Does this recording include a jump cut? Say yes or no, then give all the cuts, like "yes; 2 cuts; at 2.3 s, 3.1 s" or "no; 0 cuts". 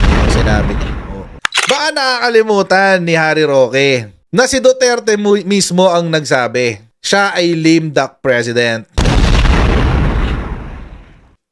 yes; 1 cut; at 1.7 s